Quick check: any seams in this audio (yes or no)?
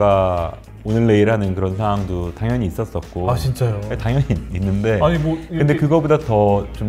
no